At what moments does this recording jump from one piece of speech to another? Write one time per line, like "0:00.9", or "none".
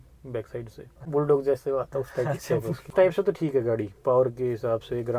0:01.0
0:02.9